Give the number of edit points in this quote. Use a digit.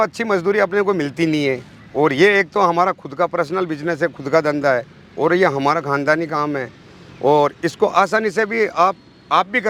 0